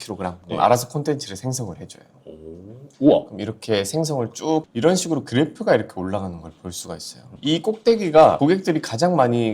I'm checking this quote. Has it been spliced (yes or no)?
yes